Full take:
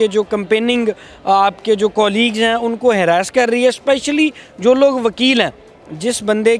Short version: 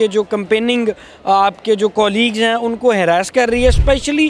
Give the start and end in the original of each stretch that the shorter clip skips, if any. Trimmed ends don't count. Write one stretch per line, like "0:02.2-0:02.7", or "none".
none

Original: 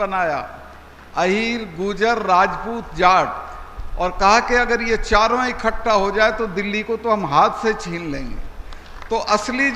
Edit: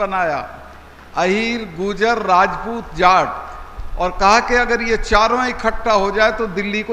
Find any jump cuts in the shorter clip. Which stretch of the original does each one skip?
none

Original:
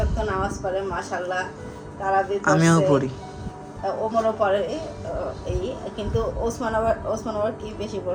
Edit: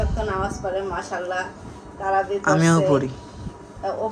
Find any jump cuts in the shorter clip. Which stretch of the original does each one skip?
none

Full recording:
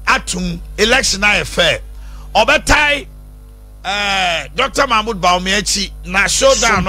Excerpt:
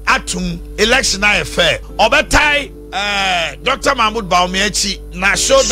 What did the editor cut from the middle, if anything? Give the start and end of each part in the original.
0:01.9-0:02.2
0:03.1-0:03.7

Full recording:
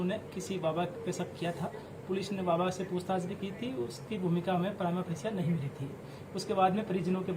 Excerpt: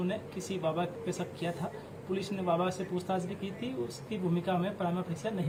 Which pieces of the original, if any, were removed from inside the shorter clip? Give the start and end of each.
none

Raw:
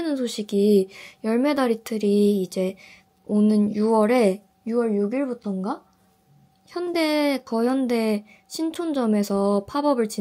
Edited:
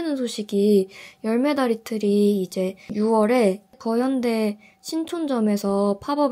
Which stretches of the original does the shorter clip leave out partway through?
0:02.9-0:03.7
0:04.6-0:07.4

